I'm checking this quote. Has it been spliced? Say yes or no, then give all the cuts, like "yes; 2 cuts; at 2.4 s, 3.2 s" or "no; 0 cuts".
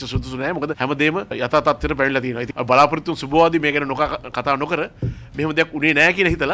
no; 0 cuts